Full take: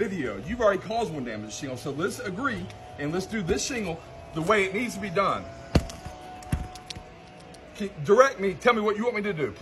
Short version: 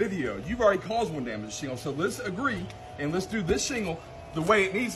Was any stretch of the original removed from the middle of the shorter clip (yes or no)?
no